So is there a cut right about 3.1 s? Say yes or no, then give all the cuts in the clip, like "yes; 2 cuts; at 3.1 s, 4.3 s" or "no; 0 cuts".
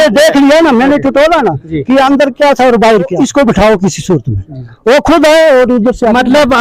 yes; 1 cut; at 3.1 s